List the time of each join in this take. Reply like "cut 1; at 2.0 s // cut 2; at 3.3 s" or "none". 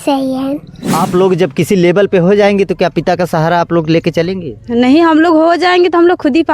cut 1; at 1.0 s